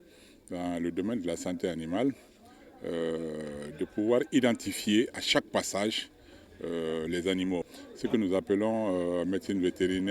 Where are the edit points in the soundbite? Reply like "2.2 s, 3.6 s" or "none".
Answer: 7.8 s